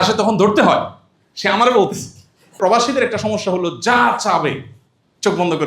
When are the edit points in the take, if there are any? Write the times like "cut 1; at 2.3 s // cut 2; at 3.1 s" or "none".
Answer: cut 1; at 2.6 s

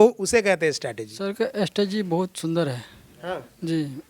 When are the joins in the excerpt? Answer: cut 1; at 1.1 s

